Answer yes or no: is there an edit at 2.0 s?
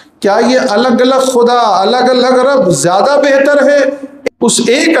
no